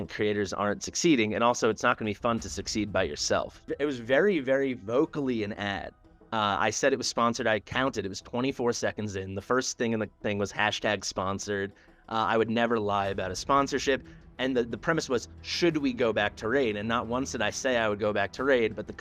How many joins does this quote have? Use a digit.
1